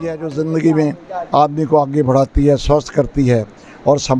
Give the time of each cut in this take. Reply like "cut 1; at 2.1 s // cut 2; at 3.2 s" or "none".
none